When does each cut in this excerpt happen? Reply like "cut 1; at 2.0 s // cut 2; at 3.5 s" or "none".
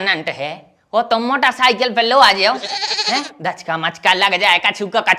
none